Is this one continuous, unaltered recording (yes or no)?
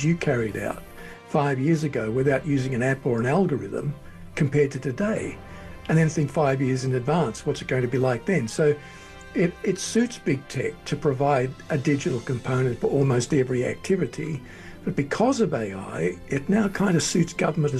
yes